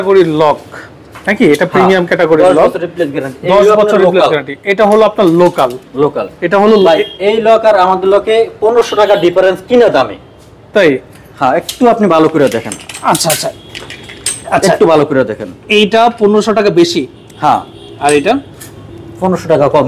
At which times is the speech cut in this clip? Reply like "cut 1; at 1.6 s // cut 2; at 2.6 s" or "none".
none

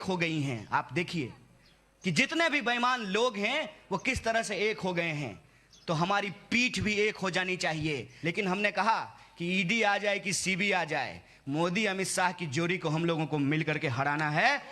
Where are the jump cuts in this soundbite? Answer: cut 1; at 8.1 s

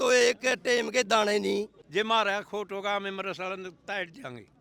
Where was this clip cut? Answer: cut 1; at 1.8 s

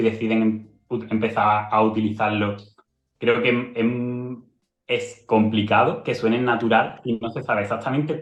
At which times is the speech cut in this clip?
none

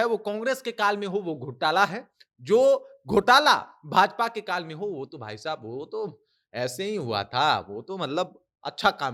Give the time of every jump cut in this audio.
none

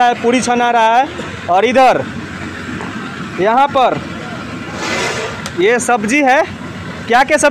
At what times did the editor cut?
none

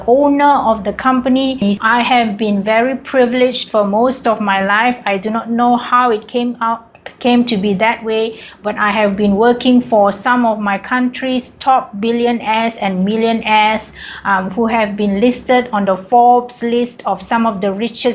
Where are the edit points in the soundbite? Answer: cut 1; at 1.6 s

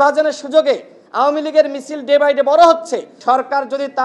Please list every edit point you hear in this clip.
cut 1; at 3.1 s

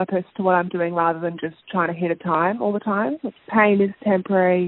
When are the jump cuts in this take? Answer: cut 1; at 3.3 s

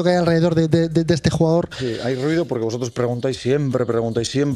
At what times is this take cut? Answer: none

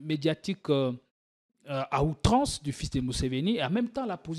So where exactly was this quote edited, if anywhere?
none

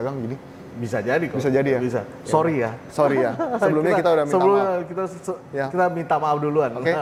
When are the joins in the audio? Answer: none

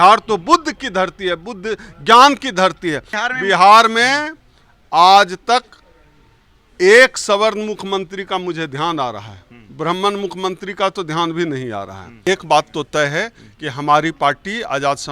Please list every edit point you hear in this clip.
cut 1; at 3.1 s // cut 2; at 12.2 s

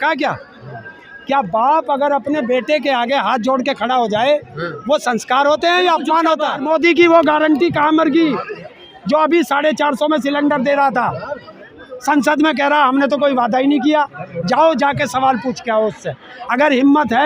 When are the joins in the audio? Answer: cut 1; at 6.6 s

